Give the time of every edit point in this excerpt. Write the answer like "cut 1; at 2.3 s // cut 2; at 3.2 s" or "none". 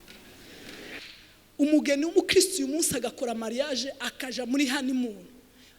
cut 1; at 1.0 s